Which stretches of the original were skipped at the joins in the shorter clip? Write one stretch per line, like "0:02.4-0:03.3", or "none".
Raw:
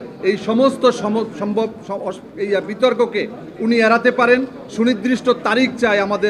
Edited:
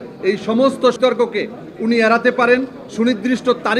0:01.0-0:02.8